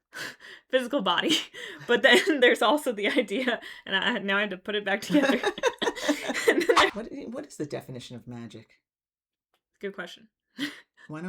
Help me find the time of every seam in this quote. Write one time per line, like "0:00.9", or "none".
0:06.9